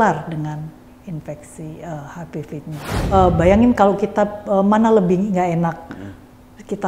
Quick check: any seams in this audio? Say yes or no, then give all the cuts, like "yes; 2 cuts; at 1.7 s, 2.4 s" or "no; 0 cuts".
yes; 1 cut; at 2.9 s